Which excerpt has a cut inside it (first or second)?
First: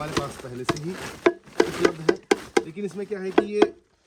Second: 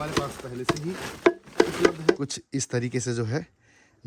second